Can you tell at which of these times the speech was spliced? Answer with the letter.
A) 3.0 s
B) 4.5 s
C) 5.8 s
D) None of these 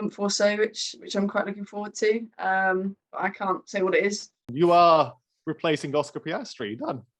B